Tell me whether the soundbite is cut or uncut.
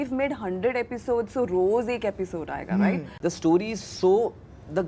cut